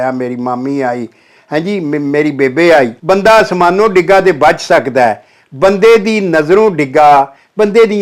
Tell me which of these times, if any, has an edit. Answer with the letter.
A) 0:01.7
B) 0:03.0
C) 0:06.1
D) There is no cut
B